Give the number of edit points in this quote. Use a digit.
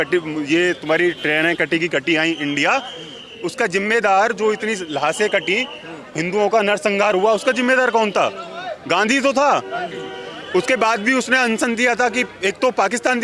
0